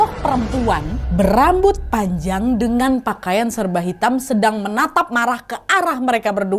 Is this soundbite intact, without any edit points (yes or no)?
yes